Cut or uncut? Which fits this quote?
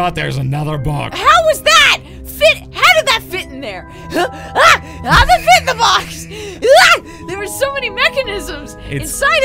cut